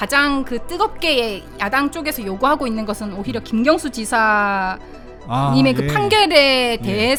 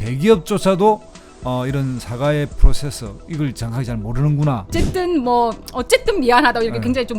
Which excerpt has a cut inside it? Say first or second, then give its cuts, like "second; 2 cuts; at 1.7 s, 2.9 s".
second; 1 cut; at 4.7 s